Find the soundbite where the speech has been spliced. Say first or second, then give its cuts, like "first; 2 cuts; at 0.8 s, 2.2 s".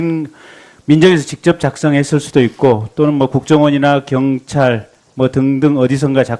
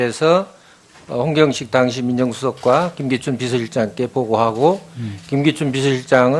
first; 1 cut; at 3.7 s